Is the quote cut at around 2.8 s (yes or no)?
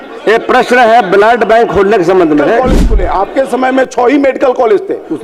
yes